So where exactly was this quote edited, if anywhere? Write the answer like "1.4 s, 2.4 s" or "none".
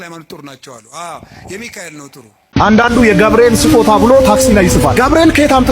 2.4 s